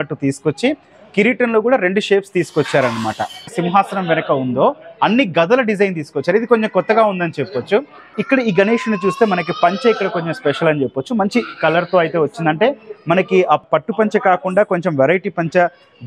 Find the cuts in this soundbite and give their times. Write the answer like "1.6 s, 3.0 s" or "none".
3.5 s, 8.2 s, 13.6 s